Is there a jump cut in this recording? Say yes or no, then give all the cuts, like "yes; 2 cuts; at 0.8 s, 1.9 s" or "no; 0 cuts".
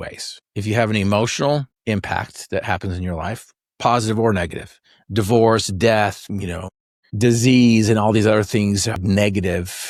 no; 0 cuts